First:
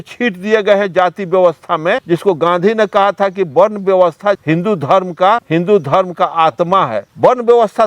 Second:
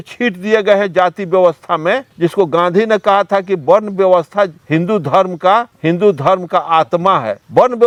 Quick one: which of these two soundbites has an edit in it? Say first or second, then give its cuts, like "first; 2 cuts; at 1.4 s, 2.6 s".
first; 3 cuts; at 2.0 s, 4.4 s, 5.4 s